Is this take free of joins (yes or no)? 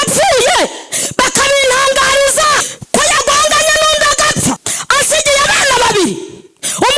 no